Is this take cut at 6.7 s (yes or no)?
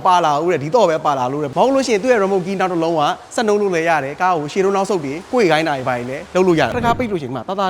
yes